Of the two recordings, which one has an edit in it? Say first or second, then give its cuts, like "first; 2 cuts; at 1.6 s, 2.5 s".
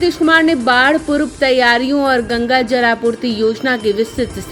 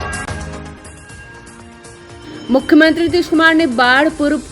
second; 1 cut; at 2.2 s